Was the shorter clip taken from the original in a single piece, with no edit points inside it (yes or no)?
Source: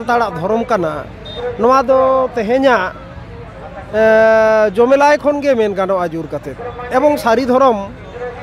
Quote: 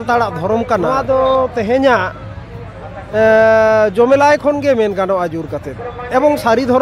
no